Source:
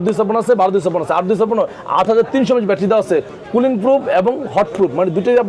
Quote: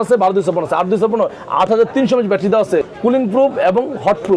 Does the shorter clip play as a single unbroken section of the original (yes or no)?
no